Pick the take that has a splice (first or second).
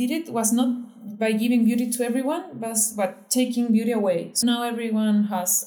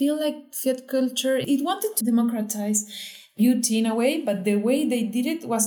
second